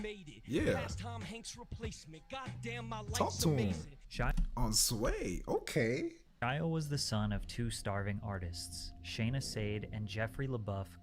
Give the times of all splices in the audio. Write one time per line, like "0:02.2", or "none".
0:06.3